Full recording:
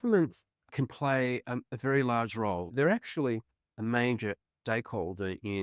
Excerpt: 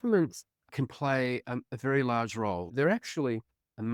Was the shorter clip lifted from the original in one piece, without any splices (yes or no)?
yes